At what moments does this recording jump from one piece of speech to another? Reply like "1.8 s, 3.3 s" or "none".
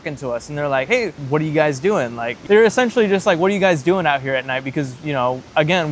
0.9 s, 2.4 s